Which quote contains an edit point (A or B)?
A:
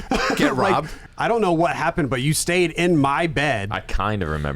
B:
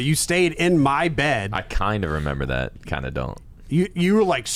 A